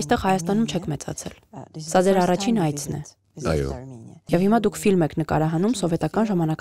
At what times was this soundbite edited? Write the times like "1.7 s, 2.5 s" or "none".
4.2 s